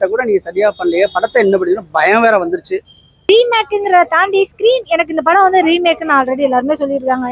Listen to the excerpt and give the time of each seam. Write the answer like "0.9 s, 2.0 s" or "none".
3.3 s